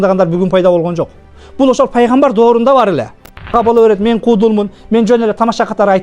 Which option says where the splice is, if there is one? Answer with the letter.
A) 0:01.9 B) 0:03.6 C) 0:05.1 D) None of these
B